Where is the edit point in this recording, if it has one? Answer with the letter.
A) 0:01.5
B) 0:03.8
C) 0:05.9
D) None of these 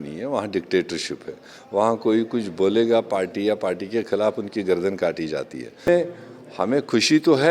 C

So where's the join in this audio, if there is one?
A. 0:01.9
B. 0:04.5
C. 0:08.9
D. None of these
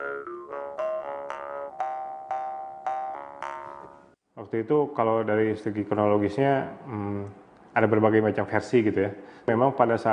B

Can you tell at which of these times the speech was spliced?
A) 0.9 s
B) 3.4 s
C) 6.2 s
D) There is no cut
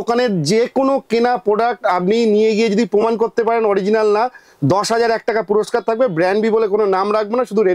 D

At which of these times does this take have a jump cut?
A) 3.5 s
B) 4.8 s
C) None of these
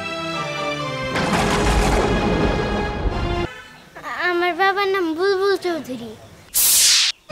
A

